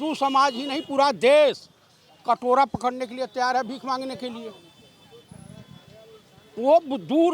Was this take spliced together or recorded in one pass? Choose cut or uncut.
uncut